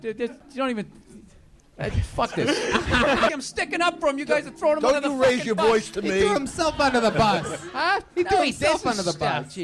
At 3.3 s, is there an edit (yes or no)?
yes